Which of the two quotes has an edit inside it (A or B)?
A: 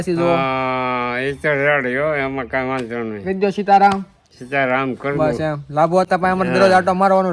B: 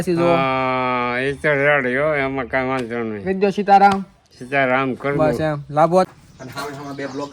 B